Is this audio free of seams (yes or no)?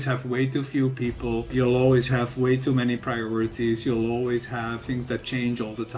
no